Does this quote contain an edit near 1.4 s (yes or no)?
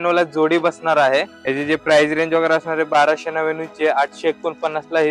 yes